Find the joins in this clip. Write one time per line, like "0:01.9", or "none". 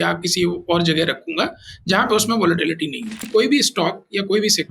0:03.2